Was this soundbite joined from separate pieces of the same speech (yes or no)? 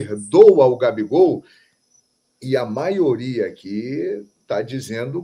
no